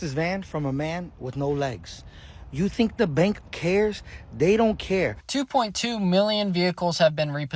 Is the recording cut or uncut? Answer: cut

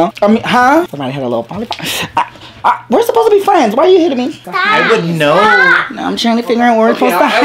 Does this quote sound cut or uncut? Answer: cut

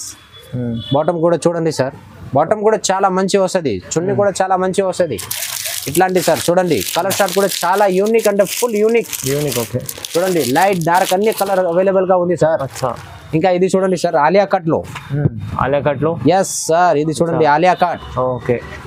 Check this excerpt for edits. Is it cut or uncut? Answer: uncut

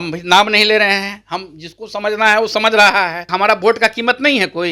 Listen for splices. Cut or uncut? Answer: cut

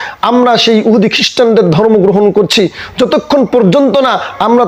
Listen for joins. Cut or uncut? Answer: uncut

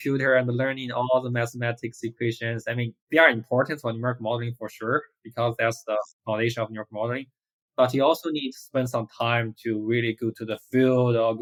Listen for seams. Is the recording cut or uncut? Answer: uncut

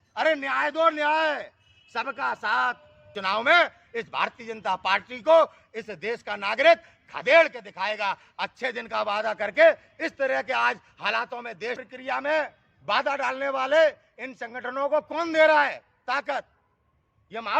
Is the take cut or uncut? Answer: cut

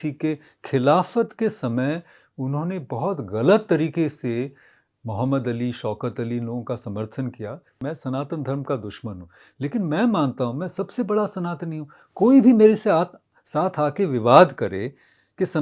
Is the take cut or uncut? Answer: cut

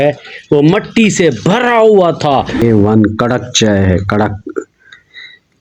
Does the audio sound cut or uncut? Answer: cut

